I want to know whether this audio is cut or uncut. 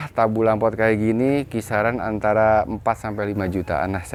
uncut